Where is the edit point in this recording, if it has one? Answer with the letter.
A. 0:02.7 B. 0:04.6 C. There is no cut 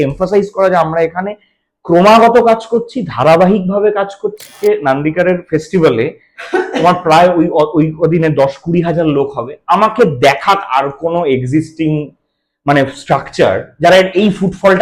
B